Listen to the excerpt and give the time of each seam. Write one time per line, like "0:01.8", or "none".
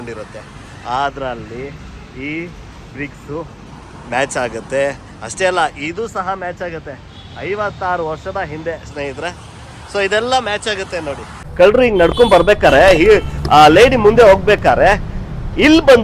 0:11.4